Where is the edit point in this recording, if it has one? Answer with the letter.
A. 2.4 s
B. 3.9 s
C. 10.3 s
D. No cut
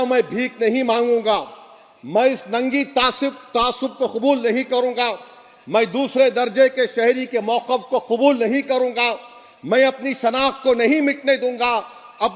D